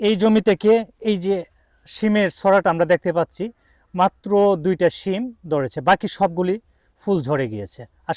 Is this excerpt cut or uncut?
uncut